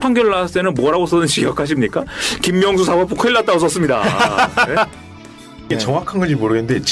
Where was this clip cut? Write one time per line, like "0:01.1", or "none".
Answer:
0:05.6